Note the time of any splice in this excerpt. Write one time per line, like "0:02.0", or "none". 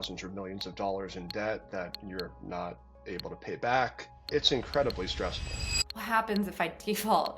0:05.9